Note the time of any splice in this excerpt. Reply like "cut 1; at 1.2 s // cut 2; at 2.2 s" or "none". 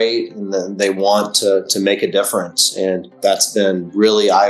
cut 1; at 3.1 s